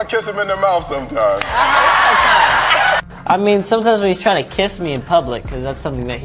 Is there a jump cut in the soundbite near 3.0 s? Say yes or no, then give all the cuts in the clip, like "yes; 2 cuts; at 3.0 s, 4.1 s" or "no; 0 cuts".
yes; 1 cut; at 3.0 s